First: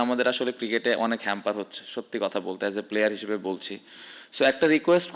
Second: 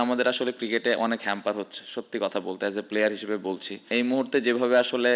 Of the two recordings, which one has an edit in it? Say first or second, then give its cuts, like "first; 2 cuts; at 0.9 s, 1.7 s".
second; 1 cut; at 3.9 s